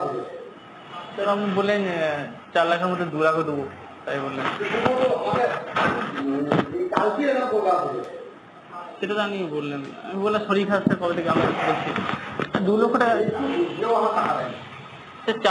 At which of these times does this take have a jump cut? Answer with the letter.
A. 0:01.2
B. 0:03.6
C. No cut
A